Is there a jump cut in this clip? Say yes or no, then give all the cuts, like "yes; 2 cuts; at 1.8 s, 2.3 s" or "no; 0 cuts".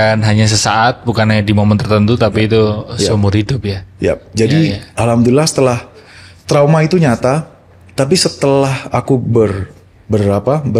no; 0 cuts